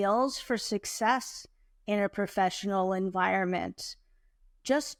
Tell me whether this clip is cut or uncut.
uncut